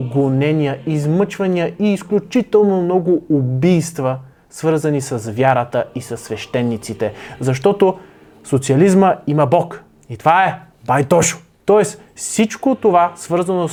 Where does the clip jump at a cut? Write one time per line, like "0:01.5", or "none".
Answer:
none